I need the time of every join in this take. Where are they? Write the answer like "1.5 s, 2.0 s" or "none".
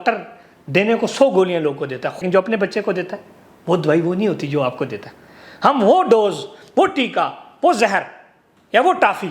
2.2 s